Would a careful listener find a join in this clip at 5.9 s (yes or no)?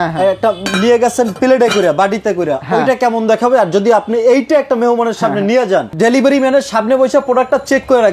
yes